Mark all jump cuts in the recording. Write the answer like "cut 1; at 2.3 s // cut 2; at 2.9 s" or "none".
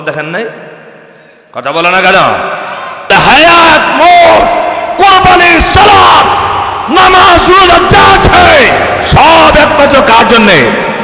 cut 1; at 3.1 s